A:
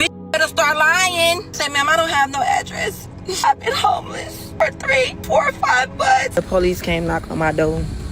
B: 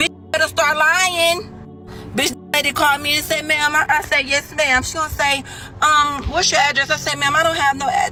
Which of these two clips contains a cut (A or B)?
A